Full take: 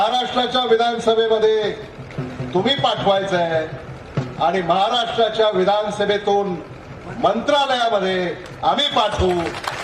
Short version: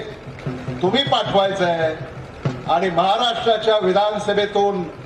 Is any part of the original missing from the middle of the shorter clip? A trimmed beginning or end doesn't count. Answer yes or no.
no